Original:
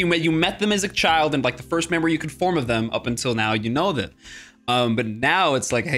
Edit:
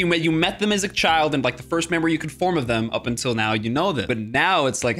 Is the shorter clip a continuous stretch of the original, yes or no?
no